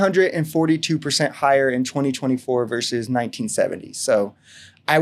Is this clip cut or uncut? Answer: uncut